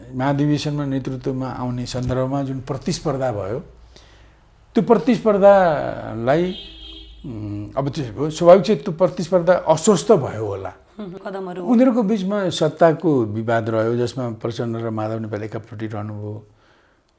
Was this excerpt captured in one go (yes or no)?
no